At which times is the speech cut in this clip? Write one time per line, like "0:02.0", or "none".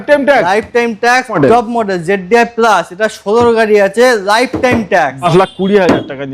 0:01.4
0:05.2